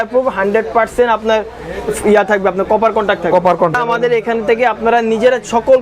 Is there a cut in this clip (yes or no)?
yes